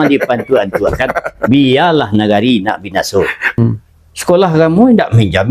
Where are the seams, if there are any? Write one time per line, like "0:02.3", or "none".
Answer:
0:03.6